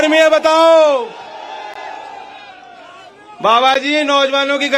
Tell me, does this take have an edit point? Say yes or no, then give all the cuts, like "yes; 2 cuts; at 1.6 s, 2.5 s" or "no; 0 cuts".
no; 0 cuts